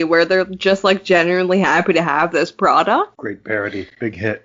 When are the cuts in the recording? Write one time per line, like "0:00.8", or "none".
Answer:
0:03.2